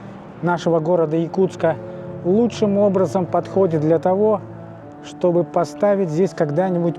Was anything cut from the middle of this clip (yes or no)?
no